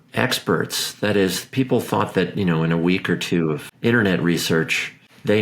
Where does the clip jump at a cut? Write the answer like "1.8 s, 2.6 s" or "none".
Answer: 3.7 s

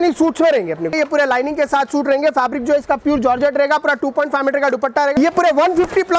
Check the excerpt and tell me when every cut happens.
0.9 s, 5.2 s

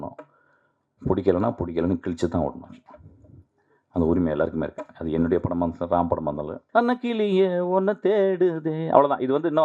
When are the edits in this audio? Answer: 6.5 s

